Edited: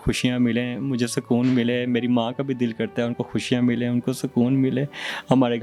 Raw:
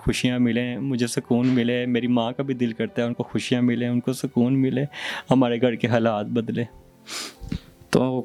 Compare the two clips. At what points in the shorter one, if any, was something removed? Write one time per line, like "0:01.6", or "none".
none

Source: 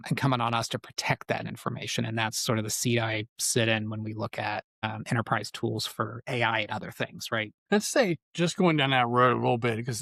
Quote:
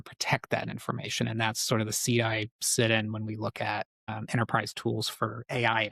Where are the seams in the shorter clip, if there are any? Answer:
none

